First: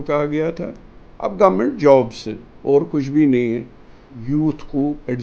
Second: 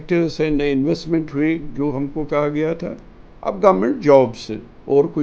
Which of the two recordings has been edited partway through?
first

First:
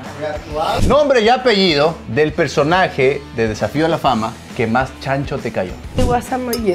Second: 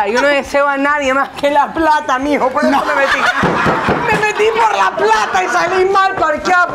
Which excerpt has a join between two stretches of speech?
first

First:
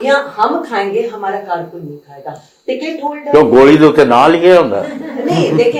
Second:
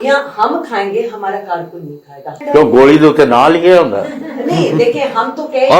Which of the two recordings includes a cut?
second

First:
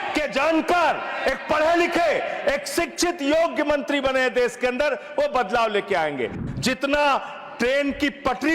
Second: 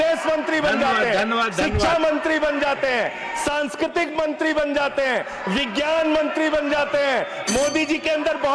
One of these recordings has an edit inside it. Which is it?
first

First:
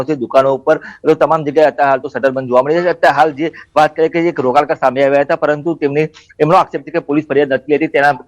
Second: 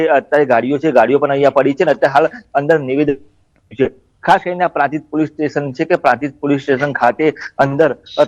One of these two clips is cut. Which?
first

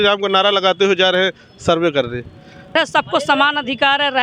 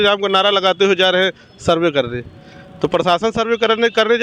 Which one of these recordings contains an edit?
first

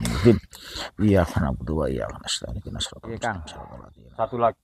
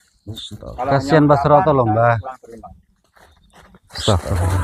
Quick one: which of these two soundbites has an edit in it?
first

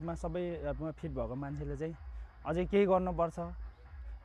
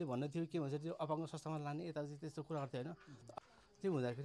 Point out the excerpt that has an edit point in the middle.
second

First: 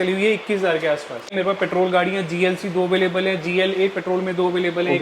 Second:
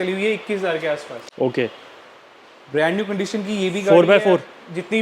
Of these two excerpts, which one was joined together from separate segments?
first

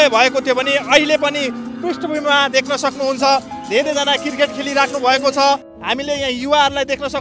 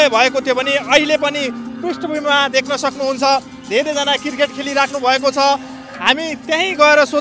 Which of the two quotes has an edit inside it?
first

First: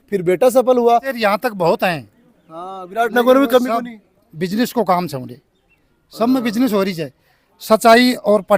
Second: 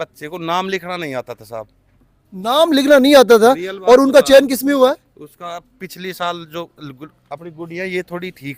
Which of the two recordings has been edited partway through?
first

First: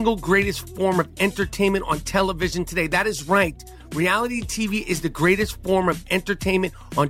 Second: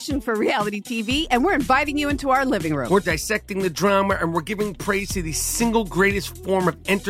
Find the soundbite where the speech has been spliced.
second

